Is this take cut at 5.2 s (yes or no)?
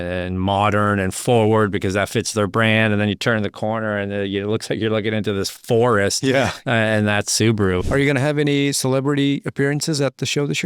no